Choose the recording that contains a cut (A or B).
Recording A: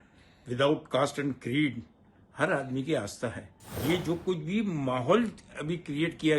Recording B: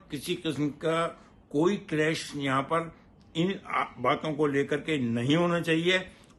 A